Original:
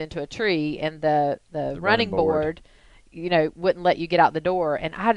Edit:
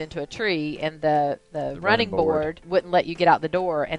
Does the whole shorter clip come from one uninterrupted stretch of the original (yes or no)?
no